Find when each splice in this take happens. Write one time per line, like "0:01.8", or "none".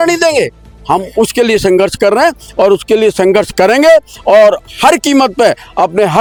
none